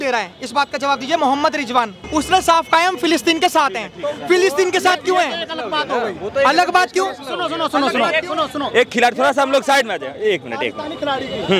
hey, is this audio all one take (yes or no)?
yes